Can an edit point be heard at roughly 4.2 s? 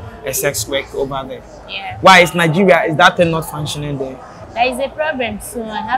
yes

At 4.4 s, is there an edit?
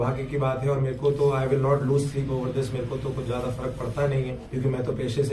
yes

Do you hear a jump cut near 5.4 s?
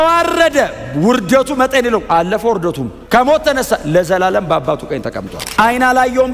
yes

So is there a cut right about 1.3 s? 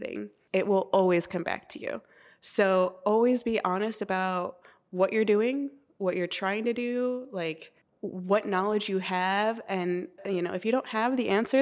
no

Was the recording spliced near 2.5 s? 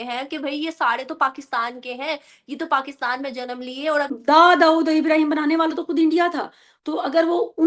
no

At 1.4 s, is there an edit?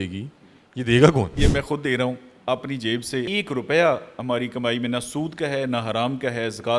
yes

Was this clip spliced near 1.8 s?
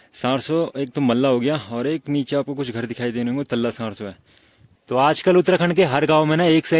no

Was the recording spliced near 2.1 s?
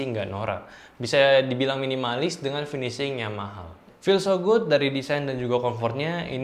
no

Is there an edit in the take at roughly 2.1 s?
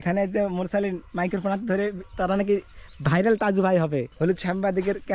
no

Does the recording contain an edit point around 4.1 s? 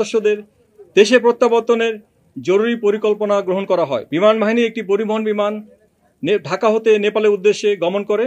yes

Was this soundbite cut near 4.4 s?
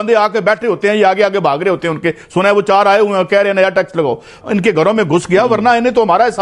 yes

